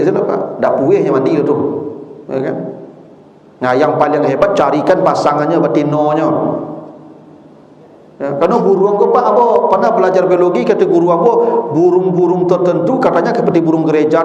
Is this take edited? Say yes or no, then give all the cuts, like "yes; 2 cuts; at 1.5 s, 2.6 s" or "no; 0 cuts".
no; 0 cuts